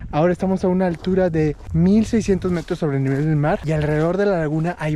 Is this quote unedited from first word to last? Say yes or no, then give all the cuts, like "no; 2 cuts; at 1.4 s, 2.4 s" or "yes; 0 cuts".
no; 2 cuts; at 1.6 s, 3.6 s